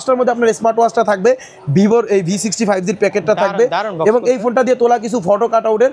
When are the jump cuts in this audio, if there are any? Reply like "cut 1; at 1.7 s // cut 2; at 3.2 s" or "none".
none